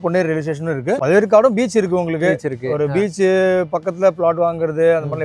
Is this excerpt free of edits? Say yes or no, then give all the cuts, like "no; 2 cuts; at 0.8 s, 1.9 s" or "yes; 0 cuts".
no; 1 cut; at 1.0 s